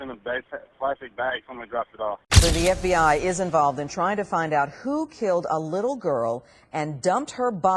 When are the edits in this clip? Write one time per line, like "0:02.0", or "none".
0:02.3